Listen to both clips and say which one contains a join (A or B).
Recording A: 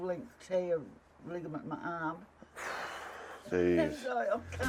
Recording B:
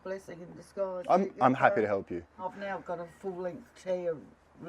B